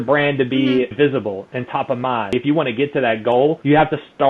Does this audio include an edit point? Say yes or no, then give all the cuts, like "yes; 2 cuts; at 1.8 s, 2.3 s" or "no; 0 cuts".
yes; 1 cut; at 2.3 s